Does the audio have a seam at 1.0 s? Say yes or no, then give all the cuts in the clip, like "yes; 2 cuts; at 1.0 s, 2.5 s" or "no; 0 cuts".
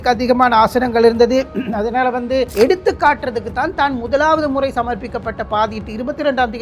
no; 1 cut; at 2.5 s